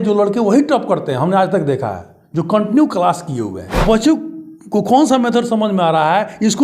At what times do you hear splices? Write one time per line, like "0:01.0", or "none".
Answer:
0:03.8